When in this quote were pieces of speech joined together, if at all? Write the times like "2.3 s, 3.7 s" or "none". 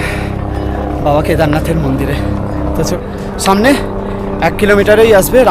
2.9 s